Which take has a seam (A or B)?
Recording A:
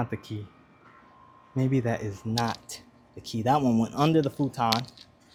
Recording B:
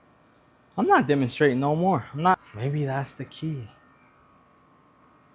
B